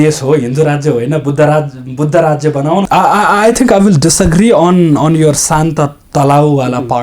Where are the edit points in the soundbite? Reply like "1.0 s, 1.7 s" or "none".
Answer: 2.9 s